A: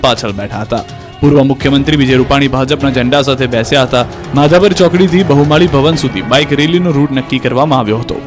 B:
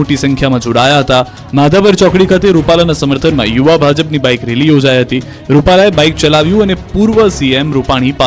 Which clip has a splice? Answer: B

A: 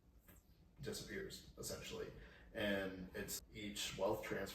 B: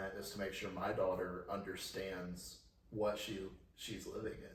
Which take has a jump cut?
A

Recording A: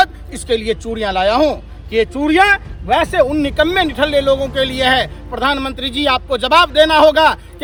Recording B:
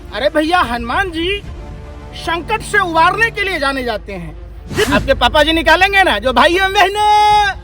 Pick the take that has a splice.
B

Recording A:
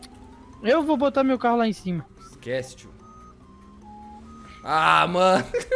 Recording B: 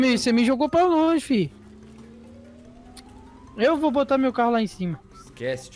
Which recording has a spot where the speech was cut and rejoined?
B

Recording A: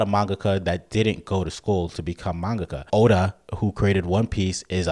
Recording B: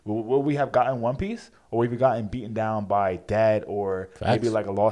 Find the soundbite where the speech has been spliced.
A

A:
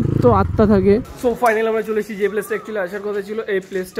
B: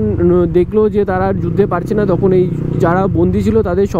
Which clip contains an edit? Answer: A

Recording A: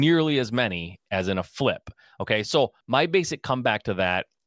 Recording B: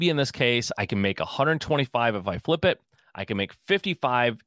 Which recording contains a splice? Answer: A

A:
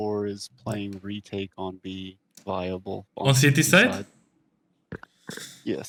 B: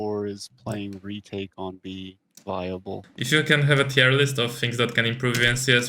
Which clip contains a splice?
B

